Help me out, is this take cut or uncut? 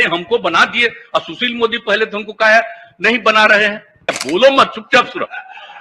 cut